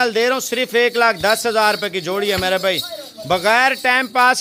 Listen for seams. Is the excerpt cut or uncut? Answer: uncut